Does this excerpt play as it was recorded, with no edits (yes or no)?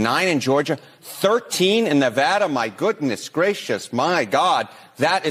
yes